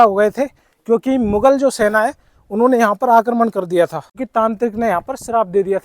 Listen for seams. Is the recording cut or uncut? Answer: cut